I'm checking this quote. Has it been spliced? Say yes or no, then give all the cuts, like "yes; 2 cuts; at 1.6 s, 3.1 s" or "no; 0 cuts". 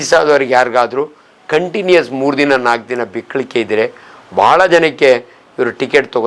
no; 0 cuts